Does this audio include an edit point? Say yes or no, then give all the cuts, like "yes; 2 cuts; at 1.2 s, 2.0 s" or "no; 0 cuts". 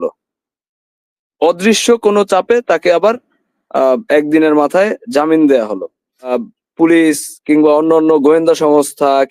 yes; 1 cut; at 6.3 s